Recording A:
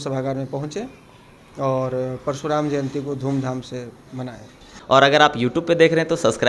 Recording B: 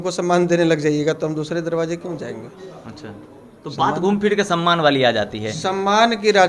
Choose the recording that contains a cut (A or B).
A